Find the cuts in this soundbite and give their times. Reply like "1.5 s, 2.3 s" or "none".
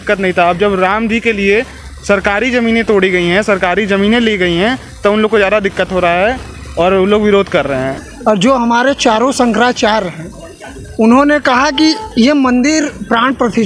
7.9 s

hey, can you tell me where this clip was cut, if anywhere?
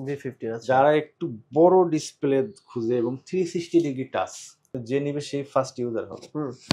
4.7 s

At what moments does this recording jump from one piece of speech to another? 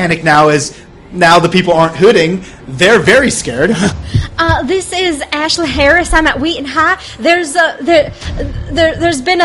3.9 s

